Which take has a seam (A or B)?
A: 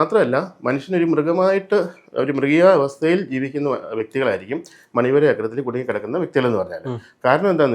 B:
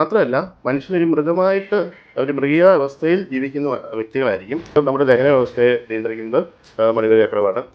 B